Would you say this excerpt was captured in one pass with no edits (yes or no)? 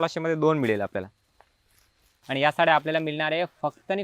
no